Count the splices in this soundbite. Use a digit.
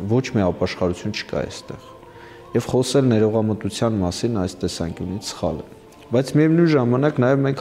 0